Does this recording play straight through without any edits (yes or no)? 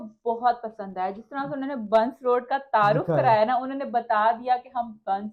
yes